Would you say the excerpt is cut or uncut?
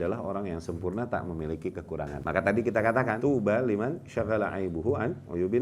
cut